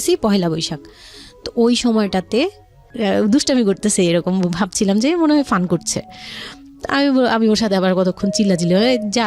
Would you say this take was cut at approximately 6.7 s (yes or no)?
no